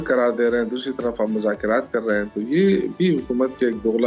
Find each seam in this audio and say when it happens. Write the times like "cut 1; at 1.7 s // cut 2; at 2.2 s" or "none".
none